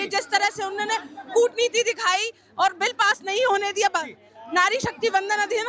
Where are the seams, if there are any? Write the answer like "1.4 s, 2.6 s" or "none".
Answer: none